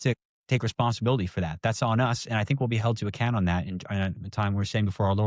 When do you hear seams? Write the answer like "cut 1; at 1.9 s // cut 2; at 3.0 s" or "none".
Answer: none